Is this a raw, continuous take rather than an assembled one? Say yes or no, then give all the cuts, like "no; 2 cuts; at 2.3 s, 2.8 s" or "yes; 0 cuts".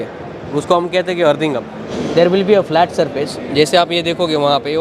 no; 1 cut; at 1.8 s